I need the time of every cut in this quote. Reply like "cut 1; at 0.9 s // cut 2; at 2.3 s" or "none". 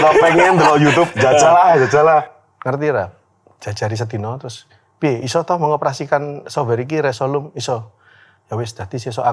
cut 1; at 2.4 s